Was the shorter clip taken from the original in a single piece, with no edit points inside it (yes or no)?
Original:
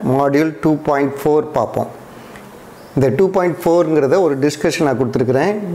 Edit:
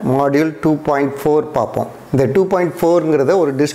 no